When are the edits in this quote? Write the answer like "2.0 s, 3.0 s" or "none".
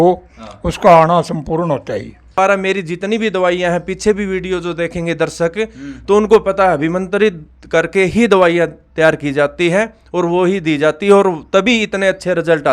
2.4 s